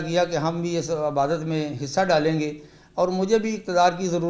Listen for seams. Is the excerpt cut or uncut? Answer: uncut